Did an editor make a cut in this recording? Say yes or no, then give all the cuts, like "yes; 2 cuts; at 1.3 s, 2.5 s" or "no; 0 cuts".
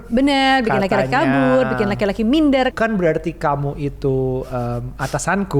yes; 1 cut; at 2.7 s